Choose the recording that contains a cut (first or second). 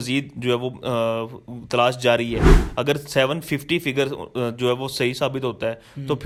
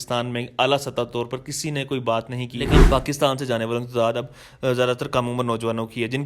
second